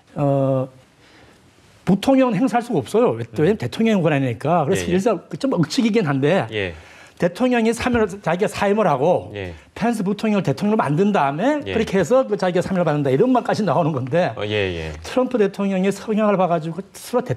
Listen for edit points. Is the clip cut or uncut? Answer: uncut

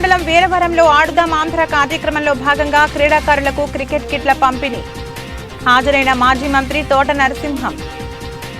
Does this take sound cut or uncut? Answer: cut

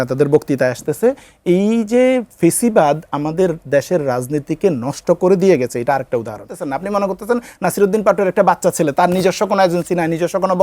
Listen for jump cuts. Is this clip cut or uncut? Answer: cut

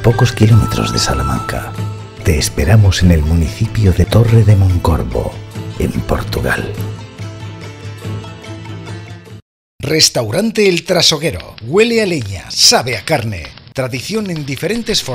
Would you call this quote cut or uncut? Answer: cut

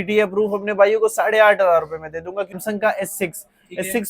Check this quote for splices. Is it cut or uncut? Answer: cut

